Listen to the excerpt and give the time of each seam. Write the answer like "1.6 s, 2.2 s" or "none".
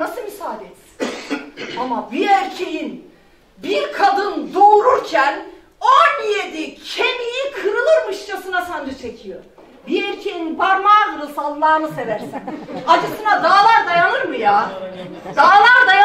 none